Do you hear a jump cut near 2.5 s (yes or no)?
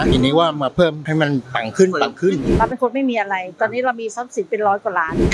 yes